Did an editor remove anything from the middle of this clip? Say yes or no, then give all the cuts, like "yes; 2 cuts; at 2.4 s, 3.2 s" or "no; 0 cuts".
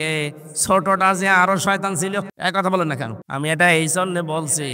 yes; 2 cuts; at 2.3 s, 3.2 s